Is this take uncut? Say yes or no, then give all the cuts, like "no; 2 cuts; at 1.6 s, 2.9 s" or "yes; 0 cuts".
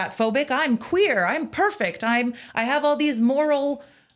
yes; 0 cuts